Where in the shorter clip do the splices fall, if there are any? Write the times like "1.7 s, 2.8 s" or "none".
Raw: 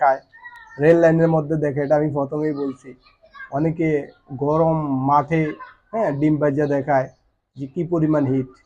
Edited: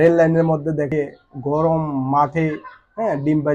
0.9 s